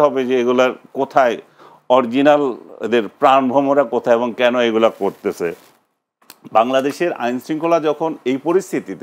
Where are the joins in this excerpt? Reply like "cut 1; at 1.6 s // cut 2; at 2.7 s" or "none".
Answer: none